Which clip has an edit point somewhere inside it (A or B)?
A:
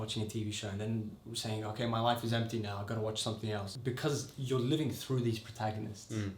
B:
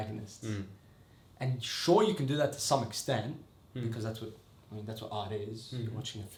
A